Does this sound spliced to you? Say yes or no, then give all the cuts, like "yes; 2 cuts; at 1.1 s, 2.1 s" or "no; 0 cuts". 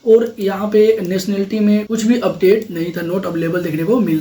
no; 0 cuts